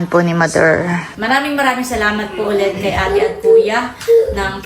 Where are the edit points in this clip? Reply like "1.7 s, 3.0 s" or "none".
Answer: 1.1 s